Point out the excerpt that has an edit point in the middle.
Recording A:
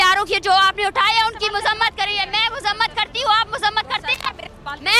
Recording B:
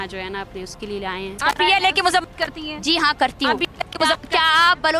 B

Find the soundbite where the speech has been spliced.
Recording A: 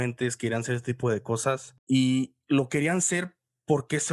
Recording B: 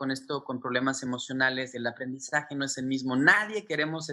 A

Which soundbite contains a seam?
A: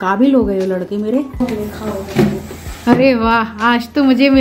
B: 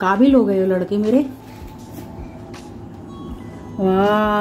A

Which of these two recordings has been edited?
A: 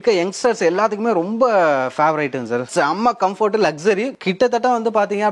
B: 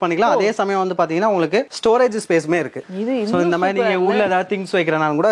A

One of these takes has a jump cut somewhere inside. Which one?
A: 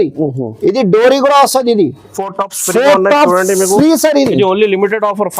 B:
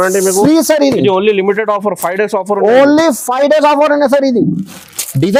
A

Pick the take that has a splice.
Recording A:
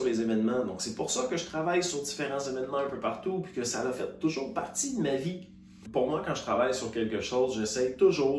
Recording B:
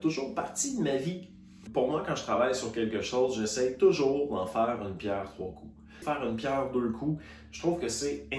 B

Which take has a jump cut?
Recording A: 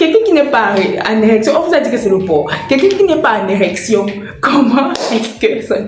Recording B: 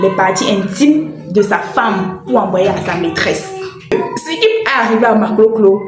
B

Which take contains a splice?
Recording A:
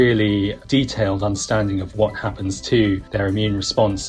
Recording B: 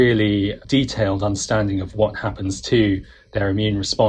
A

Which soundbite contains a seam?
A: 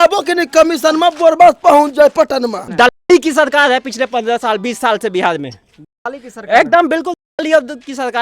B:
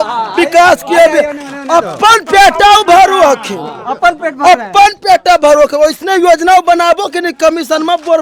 A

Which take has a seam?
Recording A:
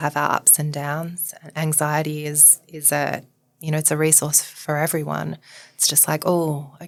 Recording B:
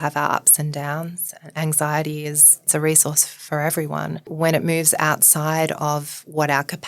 B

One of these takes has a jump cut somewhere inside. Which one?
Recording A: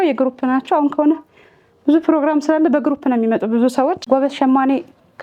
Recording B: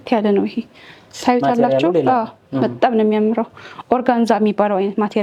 A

